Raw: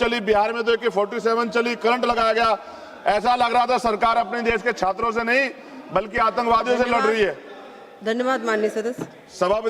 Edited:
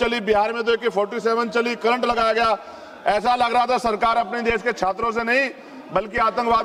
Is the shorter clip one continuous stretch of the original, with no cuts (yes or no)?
yes